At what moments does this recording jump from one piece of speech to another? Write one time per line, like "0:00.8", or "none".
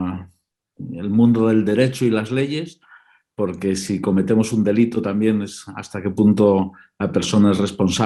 none